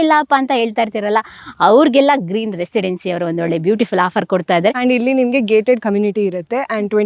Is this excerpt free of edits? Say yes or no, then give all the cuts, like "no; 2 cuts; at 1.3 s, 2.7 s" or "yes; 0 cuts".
no; 1 cut; at 4.8 s